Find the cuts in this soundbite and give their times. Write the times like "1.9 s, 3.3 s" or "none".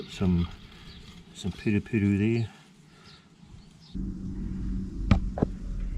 3.9 s